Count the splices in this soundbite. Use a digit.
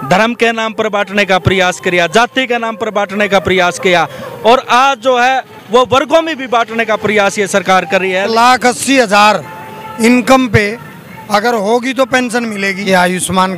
2